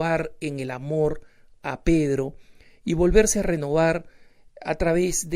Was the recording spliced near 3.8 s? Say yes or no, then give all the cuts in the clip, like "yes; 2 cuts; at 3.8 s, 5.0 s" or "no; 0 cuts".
no; 1 cut; at 2.1 s